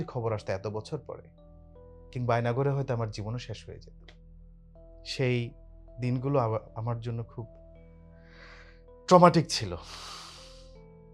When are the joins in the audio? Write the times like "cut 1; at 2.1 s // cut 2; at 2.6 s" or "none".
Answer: cut 1; at 4.8 s // cut 2; at 7.6 s // cut 3; at 9.1 s